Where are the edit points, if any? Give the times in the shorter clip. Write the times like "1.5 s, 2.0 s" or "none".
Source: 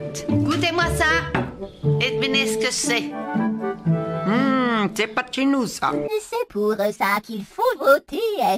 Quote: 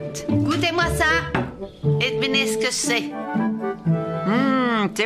none